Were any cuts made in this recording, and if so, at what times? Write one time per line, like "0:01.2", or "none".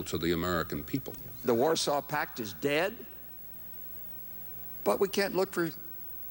0:01.4